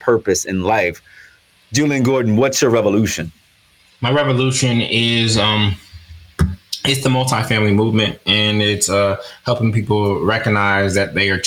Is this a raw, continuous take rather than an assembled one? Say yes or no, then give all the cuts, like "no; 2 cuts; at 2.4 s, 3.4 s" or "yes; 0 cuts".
yes; 0 cuts